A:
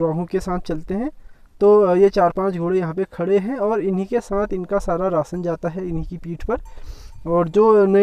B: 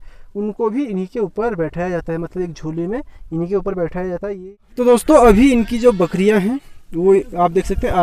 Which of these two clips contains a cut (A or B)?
B